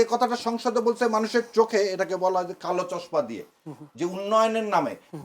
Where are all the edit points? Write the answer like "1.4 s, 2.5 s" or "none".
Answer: none